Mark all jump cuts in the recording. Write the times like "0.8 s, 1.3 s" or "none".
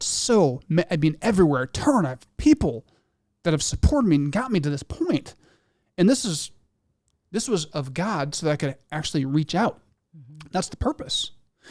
none